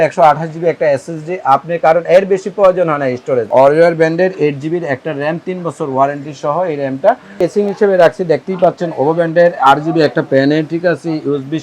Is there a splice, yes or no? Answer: yes